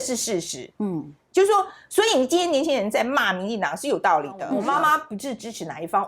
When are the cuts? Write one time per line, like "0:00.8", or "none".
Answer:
0:04.5

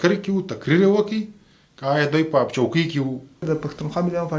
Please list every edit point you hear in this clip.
0:03.4

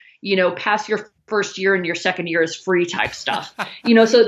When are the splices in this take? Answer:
none

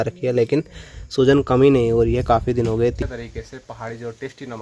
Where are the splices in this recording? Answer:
0:03.0

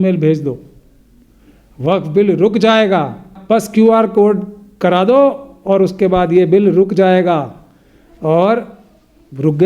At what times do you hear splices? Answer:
0:03.4

